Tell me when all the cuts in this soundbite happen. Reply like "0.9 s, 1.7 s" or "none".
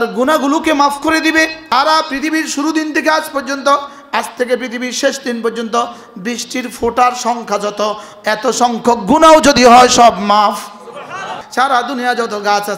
1.6 s, 11.4 s

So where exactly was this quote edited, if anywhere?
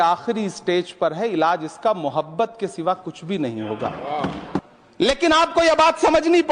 4.6 s

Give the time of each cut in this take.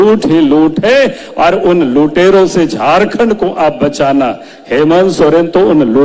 none

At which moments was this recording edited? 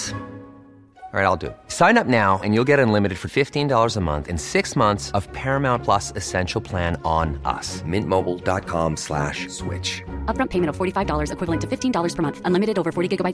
none

